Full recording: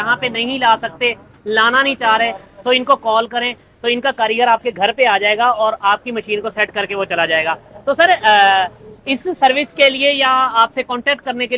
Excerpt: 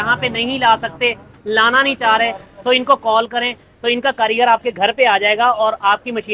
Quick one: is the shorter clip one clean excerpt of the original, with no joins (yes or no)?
yes